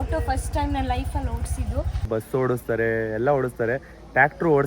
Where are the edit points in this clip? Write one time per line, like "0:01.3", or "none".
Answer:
0:02.1